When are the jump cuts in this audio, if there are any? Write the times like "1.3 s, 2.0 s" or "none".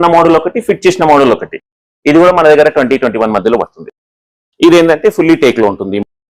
none